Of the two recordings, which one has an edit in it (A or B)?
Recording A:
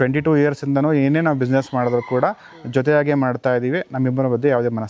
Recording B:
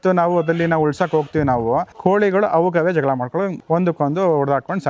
B